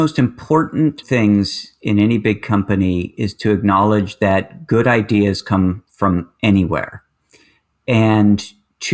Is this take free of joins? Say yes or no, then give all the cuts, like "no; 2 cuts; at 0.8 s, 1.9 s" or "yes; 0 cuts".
no; 1 cut; at 1.0 s